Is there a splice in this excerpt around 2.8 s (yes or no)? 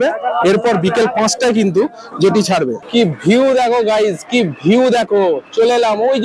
yes